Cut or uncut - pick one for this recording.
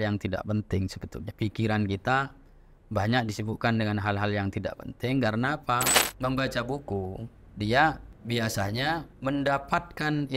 cut